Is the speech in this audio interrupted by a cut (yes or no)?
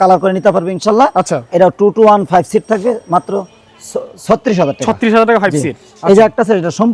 no